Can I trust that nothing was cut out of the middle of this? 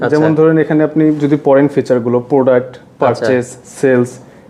yes; 0 cuts

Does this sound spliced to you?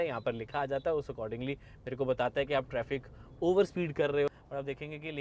yes; 1 cut; at 4.3 s

